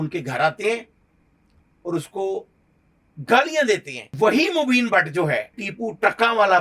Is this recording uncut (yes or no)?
no